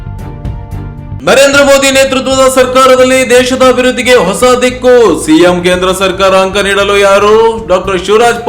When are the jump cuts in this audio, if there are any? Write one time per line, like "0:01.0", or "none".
0:01.1